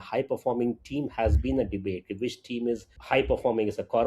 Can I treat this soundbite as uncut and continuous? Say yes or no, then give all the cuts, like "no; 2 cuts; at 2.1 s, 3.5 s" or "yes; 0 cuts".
no; 1 cut; at 2.9 s